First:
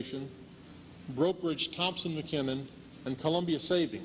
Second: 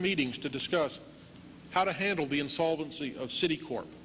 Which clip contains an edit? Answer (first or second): first